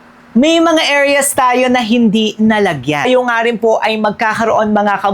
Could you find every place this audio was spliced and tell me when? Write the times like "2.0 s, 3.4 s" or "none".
3.1 s